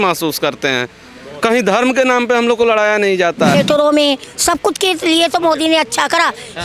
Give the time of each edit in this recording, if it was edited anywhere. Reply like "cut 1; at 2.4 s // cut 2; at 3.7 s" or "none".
cut 1; at 3.5 s